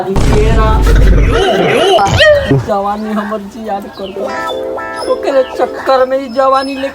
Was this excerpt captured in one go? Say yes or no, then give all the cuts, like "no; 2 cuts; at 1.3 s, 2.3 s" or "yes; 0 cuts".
no; 1 cut; at 2.0 s